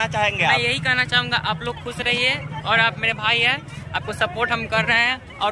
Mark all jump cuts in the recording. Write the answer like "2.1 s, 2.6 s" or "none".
none